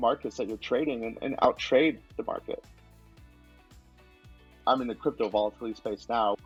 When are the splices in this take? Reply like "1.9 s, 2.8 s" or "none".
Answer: none

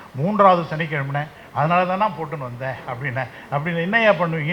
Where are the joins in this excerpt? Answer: none

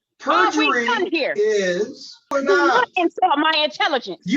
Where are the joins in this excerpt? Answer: 2.3 s

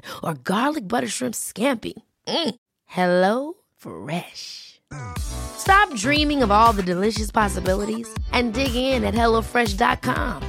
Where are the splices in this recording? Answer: none

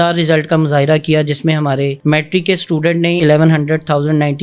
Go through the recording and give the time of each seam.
3.2 s

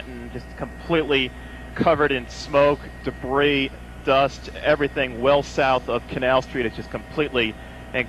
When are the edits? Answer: none

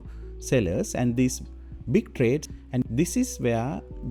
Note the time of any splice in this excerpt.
none

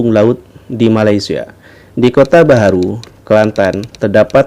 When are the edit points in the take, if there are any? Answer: none

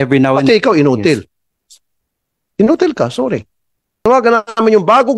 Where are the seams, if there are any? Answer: 4.0 s

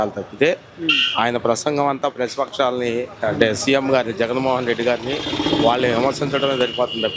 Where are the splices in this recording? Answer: none

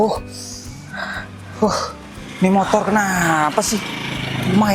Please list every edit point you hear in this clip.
none

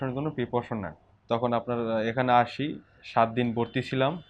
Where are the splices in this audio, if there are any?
1.0 s

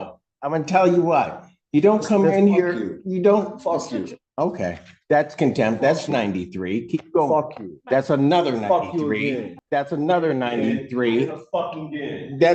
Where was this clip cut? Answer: 9.5 s

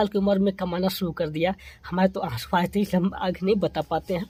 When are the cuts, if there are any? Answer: none

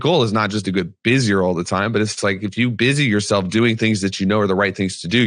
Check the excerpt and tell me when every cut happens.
none

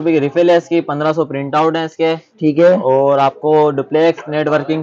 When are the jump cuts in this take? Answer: none

